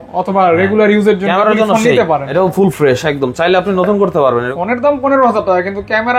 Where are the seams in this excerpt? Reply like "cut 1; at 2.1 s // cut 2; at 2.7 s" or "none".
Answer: cut 1; at 2.3 s // cut 2; at 4.5 s